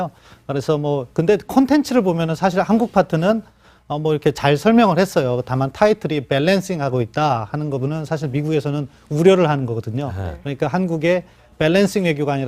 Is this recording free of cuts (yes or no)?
no